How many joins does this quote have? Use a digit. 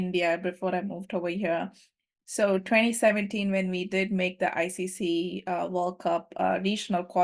0